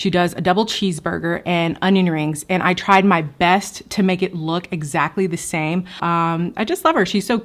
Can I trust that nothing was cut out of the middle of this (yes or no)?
no